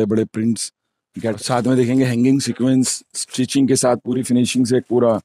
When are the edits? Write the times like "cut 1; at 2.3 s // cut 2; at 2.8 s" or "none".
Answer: cut 1; at 1.4 s // cut 2; at 4.2 s